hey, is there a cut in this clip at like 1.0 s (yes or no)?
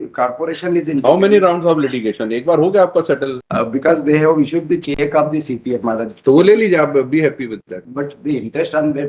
no